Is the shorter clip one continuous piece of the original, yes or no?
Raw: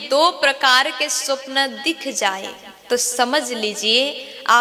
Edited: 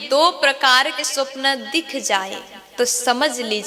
no